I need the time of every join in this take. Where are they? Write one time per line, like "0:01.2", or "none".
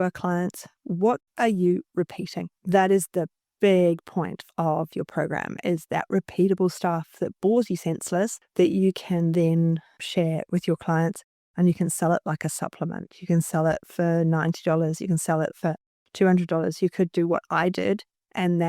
none